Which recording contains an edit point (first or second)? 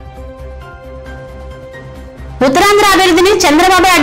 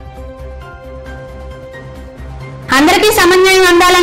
first